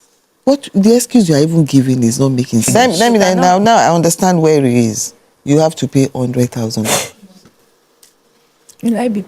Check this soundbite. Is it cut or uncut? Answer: cut